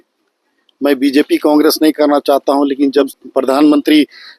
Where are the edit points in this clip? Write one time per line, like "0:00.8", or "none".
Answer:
0:03.1

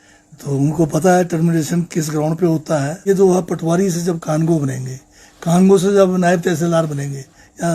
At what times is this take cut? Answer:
0:03.0

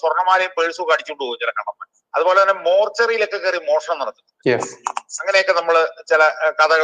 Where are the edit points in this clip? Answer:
0:01.9

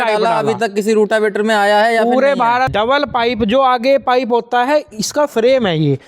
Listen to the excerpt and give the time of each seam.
0:02.7

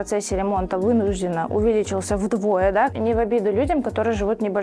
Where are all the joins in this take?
0:02.9

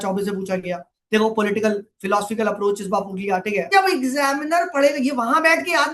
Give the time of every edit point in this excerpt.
0:03.7

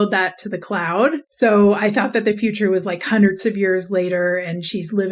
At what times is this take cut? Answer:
0:01.3

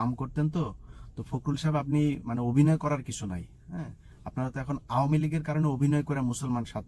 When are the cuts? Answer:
none

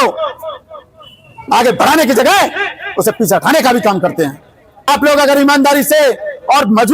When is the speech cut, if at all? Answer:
0:04.9

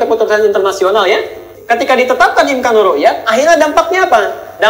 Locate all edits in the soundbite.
0:01.6

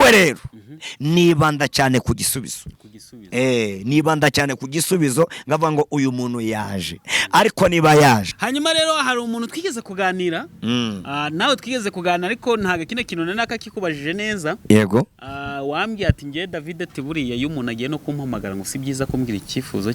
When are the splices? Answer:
0:08.3

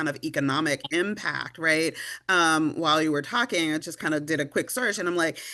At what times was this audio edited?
none

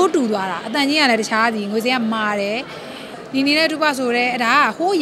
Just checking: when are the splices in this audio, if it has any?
0:03.2

